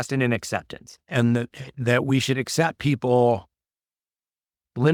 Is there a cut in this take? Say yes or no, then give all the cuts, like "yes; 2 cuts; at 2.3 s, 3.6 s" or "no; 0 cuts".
no; 0 cuts